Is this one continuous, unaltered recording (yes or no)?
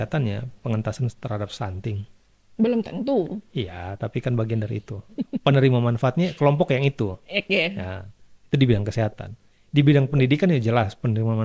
yes